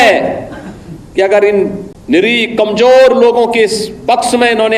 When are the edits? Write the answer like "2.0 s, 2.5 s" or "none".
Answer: 1.9 s